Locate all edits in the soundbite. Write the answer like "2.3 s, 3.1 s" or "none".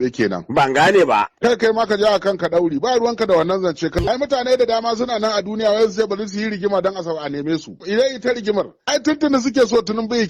4.0 s, 7.8 s, 8.8 s

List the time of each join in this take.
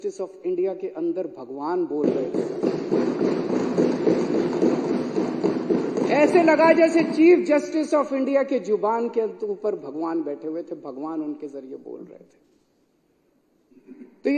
none

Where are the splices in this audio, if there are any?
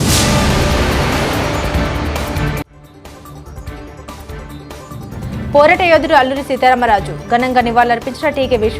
5.1 s

